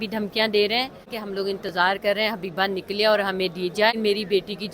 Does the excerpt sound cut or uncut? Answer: cut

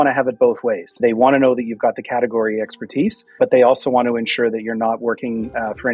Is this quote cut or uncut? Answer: cut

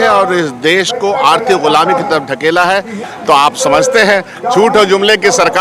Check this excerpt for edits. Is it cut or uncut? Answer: cut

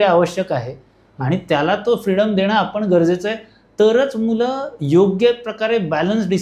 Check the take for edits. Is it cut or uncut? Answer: uncut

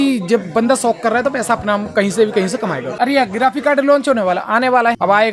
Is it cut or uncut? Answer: cut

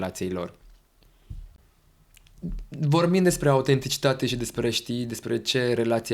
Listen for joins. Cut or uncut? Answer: cut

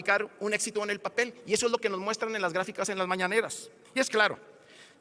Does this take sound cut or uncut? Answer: uncut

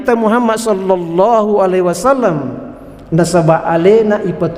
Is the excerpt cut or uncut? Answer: uncut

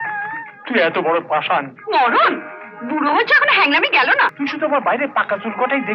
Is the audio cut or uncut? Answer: cut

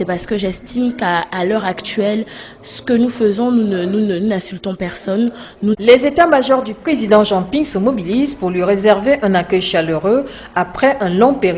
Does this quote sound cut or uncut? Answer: uncut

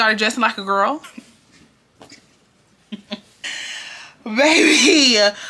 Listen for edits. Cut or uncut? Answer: uncut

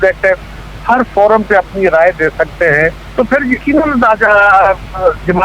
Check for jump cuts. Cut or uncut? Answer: cut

